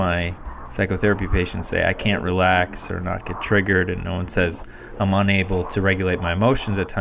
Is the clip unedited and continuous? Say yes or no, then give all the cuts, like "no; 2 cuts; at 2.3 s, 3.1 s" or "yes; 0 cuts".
yes; 0 cuts